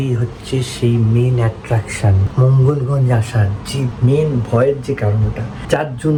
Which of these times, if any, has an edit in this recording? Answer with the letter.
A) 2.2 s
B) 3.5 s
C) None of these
C